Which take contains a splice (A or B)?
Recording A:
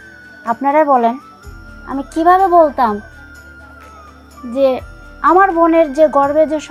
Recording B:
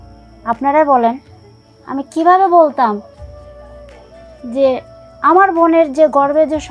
B